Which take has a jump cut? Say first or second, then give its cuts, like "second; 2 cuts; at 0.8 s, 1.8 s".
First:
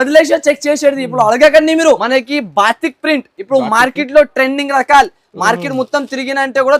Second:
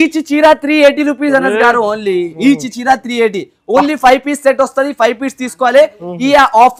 first; 1 cut; at 2.0 s